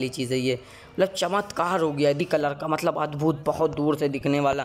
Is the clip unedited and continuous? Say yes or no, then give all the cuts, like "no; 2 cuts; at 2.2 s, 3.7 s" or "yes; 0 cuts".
no; 1 cut; at 2.2 s